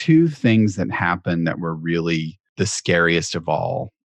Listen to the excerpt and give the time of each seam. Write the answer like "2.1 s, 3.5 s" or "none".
2.4 s